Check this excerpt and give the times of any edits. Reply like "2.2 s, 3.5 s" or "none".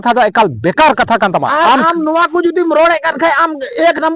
1.5 s